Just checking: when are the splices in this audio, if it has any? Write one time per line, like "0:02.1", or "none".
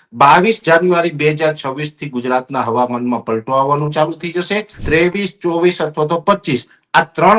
0:04.8

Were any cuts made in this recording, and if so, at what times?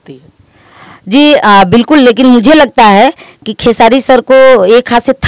none

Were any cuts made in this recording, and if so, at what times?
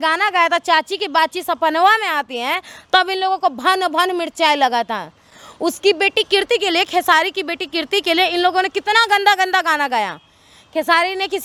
none

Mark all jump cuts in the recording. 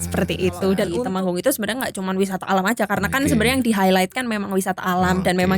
0:01.0

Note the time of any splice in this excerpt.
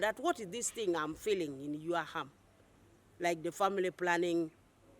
none

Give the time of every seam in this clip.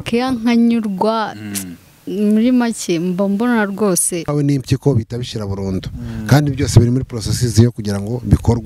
0:04.3

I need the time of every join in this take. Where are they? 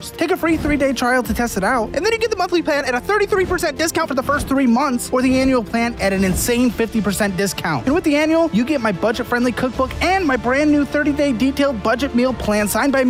none

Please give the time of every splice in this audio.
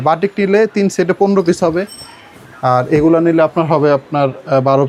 none

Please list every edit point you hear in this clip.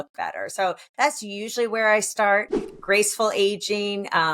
0:02.6

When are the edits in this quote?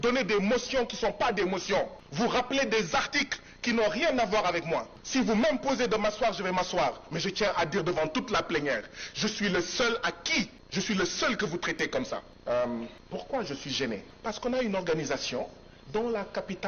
0:02.0
0:05.0
0:10.6
0:12.3
0:13.0
0:14.1

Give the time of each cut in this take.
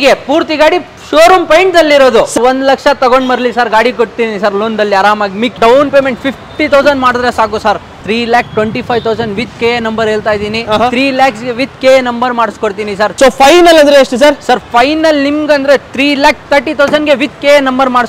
0:02.3
0:05.5
0:08.1
0:13.0

